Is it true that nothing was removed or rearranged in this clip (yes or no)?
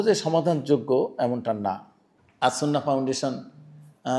yes